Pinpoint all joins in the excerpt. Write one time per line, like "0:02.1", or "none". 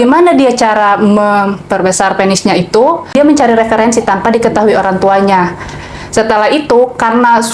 0:03.2